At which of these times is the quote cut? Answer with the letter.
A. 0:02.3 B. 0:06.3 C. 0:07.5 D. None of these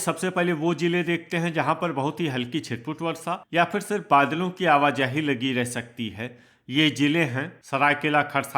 C